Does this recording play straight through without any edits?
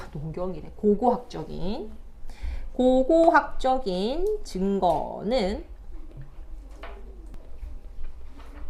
no; 1 cut; at 7.3 s

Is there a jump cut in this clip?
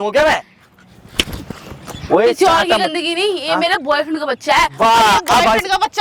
no; 0 cuts

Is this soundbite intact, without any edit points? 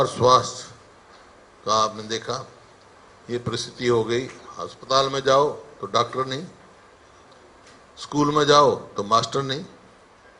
yes; 0 cuts

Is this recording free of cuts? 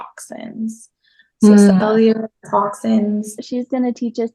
no; 1 cut; at 3.4 s

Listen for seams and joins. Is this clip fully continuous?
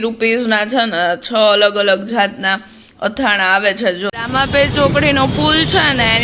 no; 1 cut; at 4.1 s

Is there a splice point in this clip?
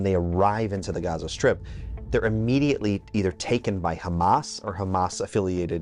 no; 0 cuts

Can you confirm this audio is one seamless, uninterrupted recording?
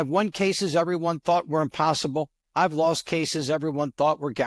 no; 1 cut; at 2.4 s

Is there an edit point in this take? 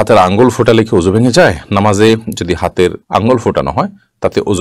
no; 0 cuts

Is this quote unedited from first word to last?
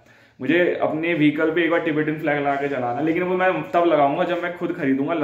yes; 0 cuts

